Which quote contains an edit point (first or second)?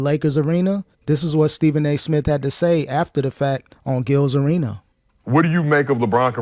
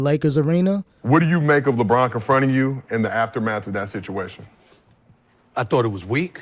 second